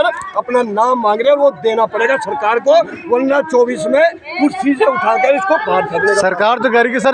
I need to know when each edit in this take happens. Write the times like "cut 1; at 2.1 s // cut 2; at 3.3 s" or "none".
none